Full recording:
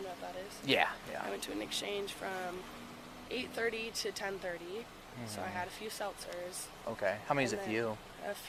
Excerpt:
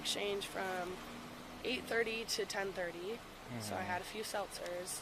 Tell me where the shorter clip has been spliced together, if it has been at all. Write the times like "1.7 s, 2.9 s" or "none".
none